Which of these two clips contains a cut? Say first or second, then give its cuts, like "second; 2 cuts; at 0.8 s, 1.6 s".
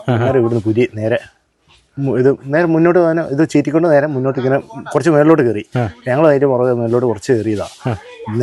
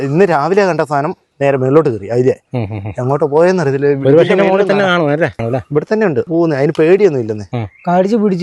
second; 3 cuts; at 5.4 s, 6.3 s, 7.5 s